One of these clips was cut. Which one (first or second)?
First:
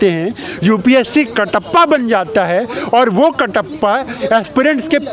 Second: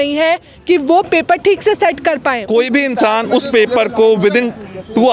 second